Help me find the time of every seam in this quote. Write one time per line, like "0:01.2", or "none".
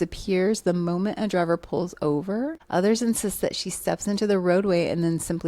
0:02.6